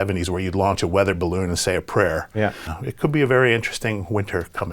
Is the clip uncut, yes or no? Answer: no